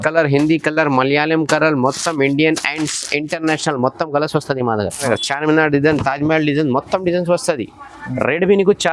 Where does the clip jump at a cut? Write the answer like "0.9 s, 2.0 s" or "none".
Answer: 5.0 s